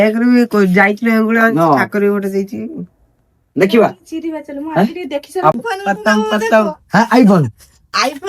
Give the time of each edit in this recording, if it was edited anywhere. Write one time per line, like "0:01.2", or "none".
0:05.6